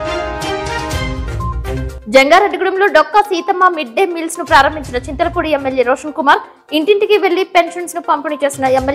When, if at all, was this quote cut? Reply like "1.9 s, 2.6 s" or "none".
none